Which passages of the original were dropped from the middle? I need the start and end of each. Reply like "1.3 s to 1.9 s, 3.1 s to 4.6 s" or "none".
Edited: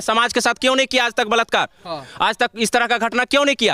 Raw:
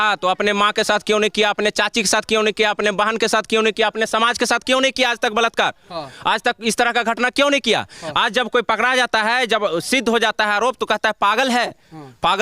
none